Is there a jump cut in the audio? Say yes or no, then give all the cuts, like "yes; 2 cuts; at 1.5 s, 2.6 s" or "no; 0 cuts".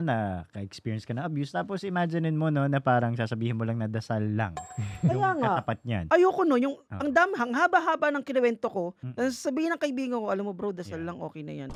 no; 0 cuts